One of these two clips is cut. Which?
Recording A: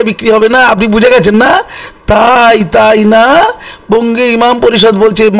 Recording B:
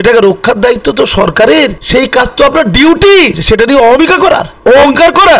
B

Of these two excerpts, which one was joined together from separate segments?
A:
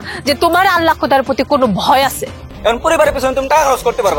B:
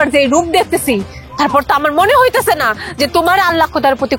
A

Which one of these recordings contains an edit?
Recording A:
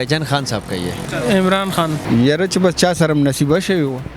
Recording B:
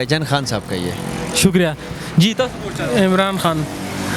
A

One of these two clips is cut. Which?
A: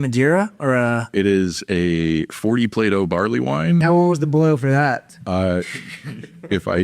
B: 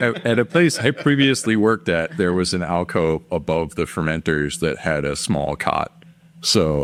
A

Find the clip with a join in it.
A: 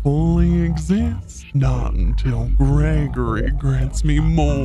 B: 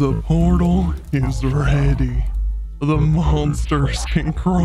A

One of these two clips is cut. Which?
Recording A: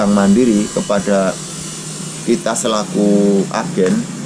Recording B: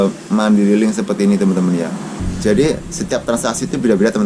B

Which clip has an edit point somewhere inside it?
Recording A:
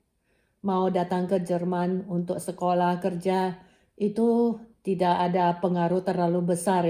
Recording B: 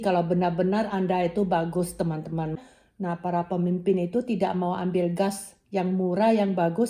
B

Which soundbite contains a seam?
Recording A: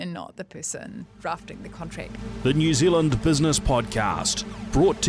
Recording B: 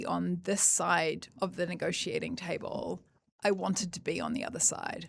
A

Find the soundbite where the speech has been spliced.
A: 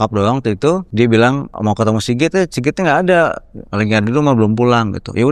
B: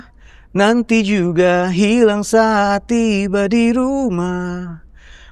A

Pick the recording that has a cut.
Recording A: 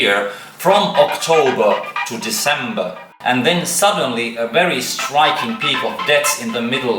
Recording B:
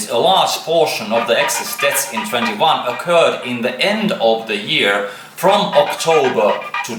A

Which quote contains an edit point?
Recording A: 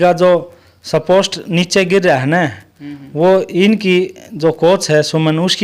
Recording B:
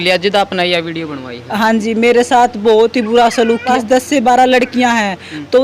B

